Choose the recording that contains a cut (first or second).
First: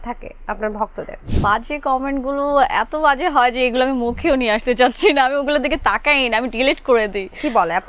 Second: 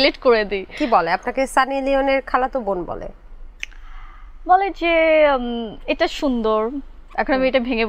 first